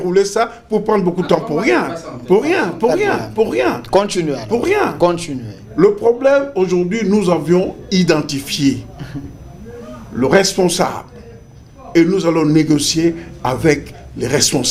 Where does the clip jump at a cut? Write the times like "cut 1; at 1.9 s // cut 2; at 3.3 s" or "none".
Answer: none